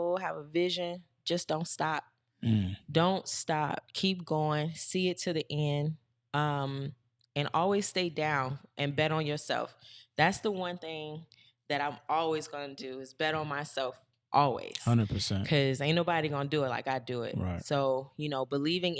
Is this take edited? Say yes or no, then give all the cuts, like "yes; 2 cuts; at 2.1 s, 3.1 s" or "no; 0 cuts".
no; 0 cuts